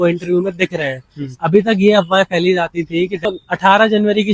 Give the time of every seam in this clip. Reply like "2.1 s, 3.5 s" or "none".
3.2 s